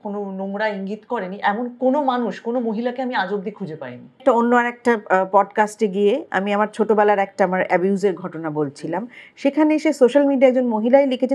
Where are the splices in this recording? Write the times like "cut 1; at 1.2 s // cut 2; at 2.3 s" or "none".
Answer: cut 1; at 4.2 s